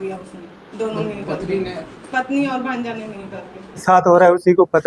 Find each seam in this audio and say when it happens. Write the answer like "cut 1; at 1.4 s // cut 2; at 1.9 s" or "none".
cut 1; at 3.8 s